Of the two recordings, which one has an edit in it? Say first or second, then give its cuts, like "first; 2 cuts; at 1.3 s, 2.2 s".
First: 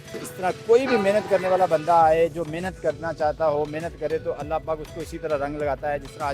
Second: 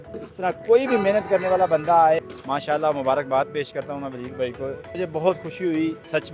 second; 2 cuts; at 2.2 s, 4.9 s